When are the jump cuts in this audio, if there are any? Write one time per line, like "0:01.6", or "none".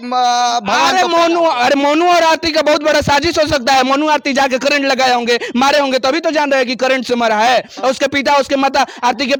none